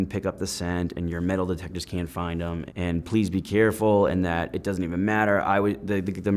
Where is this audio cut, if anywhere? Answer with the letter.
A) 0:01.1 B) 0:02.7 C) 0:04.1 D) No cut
B